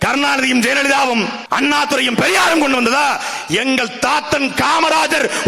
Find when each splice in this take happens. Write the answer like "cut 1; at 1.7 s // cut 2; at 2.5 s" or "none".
cut 1; at 1.4 s